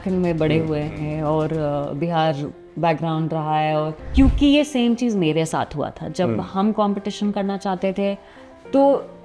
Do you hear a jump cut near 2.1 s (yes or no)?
no